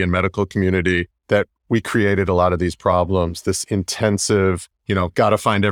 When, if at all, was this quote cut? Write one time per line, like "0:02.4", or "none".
0:01.1
0:04.7